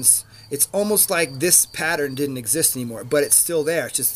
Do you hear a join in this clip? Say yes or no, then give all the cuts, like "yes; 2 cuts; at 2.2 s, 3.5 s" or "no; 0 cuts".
no; 0 cuts